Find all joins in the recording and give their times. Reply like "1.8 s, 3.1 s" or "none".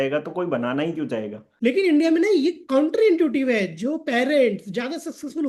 1.4 s

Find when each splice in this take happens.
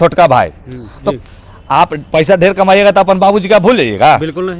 1.1 s

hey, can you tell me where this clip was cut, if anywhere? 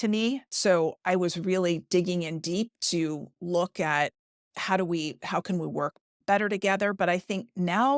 none

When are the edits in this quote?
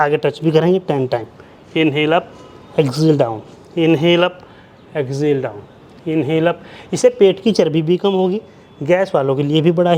none

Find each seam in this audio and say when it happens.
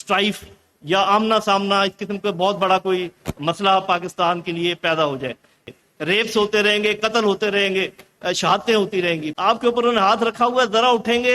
5.7 s, 9.3 s

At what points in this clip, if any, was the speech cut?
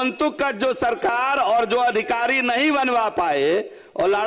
none

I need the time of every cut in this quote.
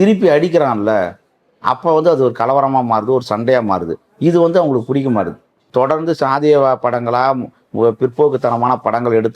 5.6 s

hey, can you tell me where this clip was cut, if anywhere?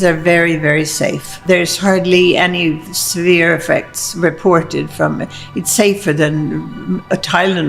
1.4 s

